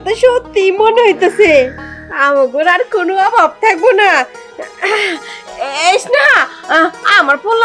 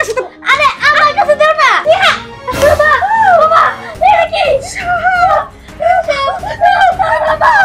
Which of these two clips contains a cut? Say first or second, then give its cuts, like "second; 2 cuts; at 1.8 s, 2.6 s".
second; 1 cut; at 1.8 s